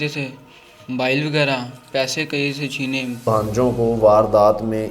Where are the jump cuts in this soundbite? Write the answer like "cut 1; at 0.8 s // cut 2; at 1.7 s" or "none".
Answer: cut 1; at 3.2 s